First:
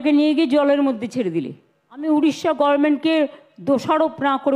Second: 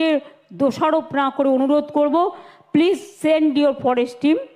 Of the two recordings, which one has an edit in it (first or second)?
first